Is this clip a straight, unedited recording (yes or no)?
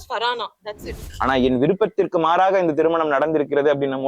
no